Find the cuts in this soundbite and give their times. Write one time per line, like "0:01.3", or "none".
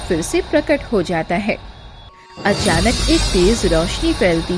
0:02.2